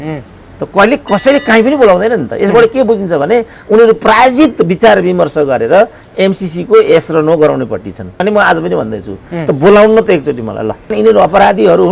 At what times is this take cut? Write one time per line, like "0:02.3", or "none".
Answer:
0:08.2
0:10.9